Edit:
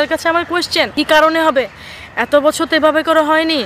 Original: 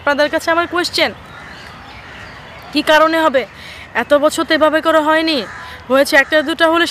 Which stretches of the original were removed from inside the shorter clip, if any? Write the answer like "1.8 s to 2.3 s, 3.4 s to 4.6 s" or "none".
1.1 s to 2.7 s